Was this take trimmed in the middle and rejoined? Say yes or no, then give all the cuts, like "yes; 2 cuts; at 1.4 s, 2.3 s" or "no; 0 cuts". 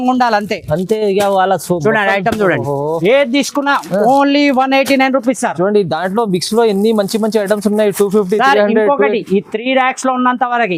no; 0 cuts